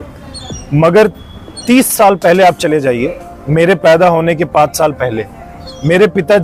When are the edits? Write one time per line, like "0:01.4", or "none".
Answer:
none